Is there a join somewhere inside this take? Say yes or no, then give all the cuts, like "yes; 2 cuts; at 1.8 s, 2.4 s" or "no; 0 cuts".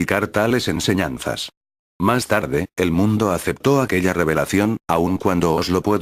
no; 0 cuts